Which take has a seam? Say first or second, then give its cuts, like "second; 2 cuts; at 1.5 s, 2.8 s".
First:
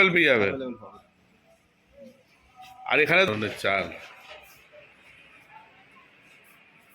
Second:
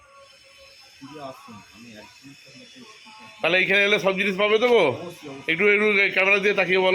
first; 1 cut; at 3.3 s